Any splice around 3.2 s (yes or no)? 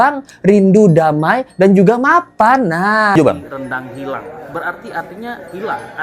yes